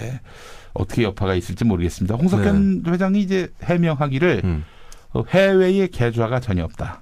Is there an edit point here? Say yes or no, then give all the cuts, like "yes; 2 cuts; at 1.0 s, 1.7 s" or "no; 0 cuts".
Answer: no; 0 cuts